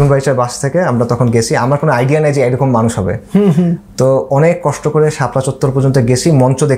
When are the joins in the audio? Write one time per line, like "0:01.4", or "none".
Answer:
none